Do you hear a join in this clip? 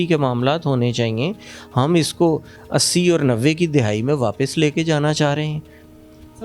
no; 0 cuts

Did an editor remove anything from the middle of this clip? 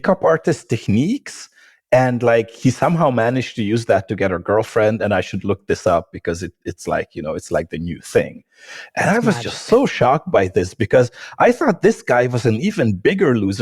yes; 1 cut; at 2.6 s

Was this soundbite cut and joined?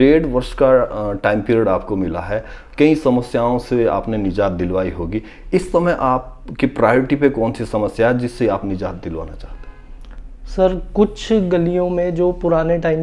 no; 0 cuts

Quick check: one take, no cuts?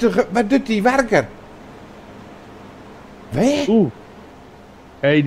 yes; 0 cuts

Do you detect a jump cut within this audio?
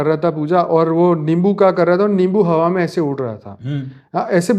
no; 0 cuts

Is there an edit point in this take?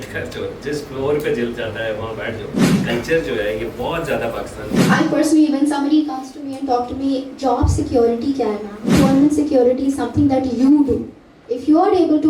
yes; 3 cuts; at 2.7 s, 4.6 s, 9.0 s

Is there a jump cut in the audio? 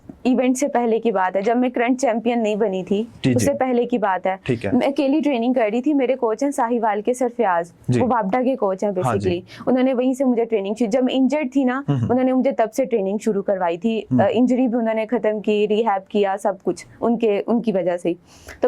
no; 0 cuts

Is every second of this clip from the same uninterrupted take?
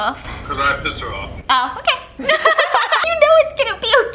no; 1 cut; at 3.1 s

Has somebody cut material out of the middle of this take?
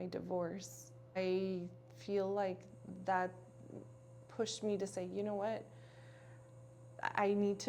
yes; 1 cut; at 1.2 s

